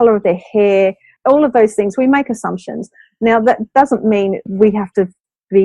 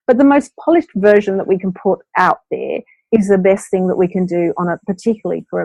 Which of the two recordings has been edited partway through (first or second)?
first